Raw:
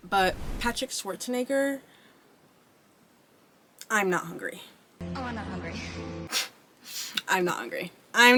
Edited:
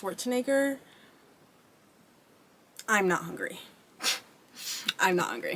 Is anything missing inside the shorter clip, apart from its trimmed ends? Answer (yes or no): yes